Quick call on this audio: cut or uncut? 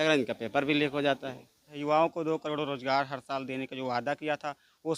cut